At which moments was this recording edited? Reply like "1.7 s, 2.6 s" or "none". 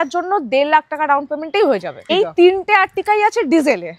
2.1 s